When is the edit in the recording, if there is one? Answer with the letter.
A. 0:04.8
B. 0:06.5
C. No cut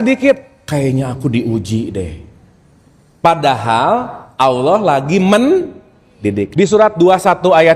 B